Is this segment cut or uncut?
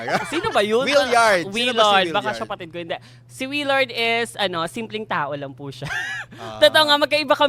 uncut